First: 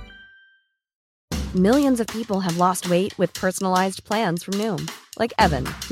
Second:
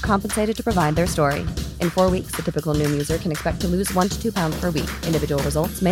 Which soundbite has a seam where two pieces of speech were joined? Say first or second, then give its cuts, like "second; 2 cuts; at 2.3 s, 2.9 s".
first; 1 cut; at 1.0 s